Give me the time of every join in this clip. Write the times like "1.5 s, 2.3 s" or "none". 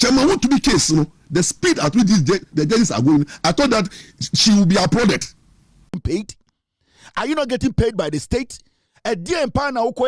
5.9 s

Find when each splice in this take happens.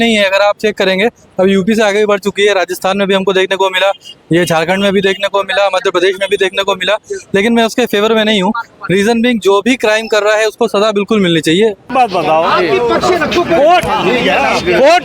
11.8 s

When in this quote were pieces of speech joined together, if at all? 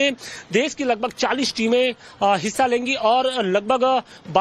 none

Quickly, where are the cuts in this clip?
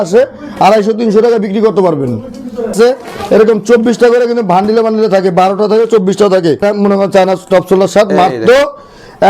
2.7 s, 6.6 s

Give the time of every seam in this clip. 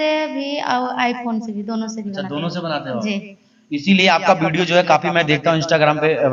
none

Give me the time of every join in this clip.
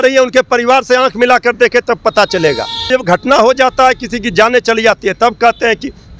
2.9 s

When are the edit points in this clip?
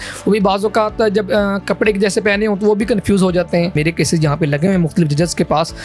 3.8 s

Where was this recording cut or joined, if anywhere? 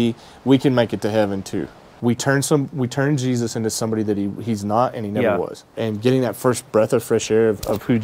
1.9 s, 5.7 s

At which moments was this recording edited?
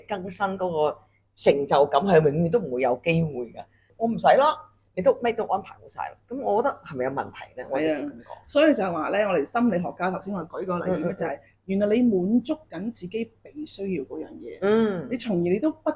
3.9 s

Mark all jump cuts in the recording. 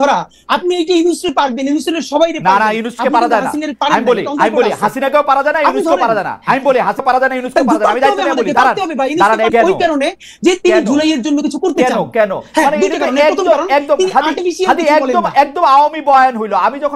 7.0 s, 9.5 s

